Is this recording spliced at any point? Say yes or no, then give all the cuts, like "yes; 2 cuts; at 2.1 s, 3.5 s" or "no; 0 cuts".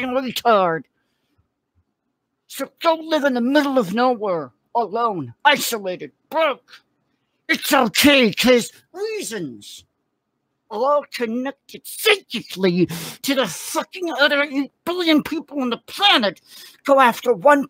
yes; 1 cut; at 10.6 s